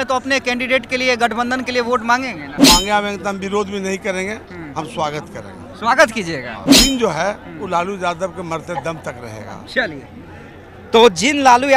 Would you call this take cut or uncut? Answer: cut